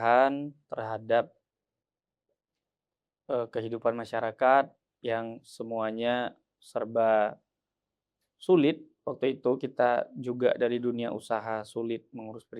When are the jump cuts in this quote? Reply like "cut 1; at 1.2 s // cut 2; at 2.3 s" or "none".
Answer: none